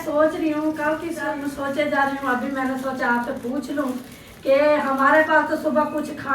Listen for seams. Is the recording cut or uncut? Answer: cut